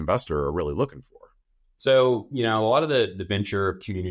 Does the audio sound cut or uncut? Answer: uncut